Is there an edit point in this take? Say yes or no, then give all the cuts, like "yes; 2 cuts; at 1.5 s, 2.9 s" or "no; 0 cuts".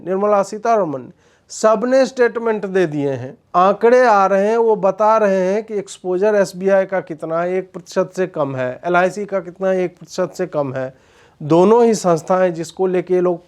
yes; 1 cut; at 3.3 s